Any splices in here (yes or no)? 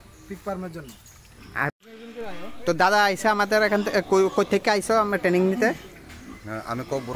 yes